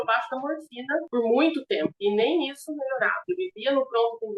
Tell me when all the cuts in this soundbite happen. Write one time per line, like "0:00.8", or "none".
0:01.1
0:01.9
0:03.2